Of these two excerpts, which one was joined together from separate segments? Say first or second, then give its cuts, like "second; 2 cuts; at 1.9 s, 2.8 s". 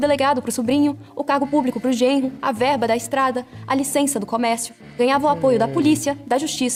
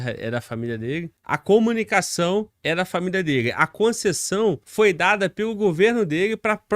second; 3 cuts; at 1.2 s, 2.5 s, 4.6 s